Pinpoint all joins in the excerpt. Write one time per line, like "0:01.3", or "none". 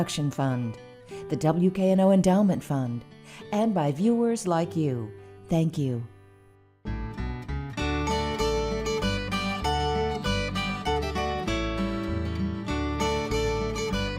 0:11.1